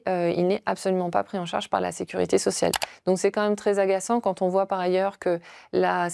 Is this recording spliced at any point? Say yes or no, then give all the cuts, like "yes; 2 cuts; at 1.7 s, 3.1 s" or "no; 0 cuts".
no; 0 cuts